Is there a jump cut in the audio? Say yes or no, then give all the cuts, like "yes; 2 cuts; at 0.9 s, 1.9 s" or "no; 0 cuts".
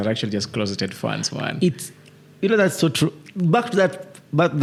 no; 0 cuts